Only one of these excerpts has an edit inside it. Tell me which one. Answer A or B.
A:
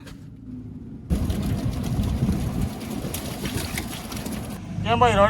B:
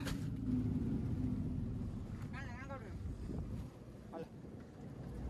A